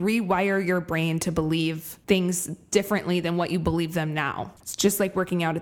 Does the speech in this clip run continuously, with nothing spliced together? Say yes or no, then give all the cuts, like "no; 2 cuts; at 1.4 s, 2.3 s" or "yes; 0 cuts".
no; 1 cut; at 4.6 s